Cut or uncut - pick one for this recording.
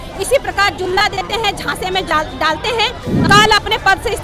cut